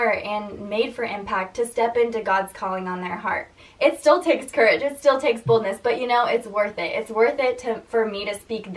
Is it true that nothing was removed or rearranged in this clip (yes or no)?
no